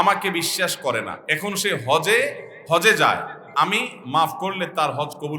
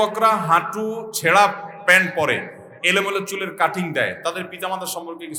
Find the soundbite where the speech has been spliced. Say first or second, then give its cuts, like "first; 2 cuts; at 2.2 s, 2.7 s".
first; 3 cuts; at 1.2 s, 2.5 s, 3.4 s